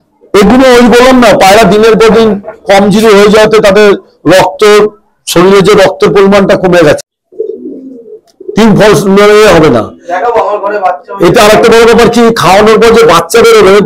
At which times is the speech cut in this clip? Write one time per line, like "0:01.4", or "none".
0:07.0